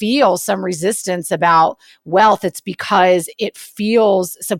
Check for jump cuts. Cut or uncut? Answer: uncut